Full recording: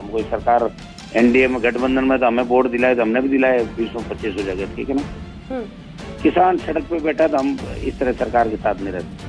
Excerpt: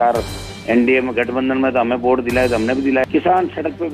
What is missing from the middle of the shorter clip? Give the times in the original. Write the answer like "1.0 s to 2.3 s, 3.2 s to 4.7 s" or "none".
3.5 s to 6.1 s